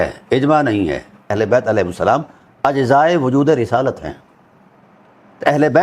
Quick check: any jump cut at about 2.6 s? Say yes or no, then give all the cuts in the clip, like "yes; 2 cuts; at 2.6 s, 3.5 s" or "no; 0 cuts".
no; 1 cut; at 1.4 s